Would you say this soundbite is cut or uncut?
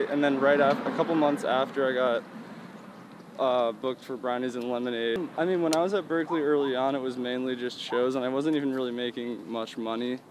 cut